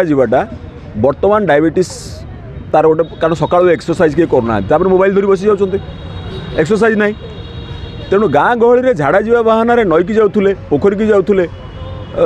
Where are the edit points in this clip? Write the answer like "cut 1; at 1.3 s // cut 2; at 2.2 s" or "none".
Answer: none